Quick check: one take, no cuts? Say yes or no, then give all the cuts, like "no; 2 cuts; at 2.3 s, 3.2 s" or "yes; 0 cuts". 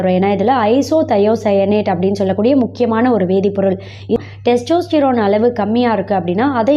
no; 1 cut; at 4.2 s